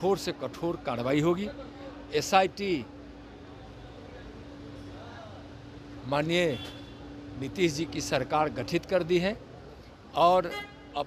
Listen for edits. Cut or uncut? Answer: uncut